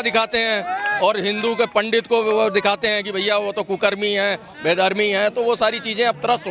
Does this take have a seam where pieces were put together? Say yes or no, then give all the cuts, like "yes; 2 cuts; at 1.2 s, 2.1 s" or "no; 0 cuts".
no; 0 cuts